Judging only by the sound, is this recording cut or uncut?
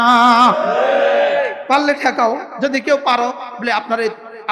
cut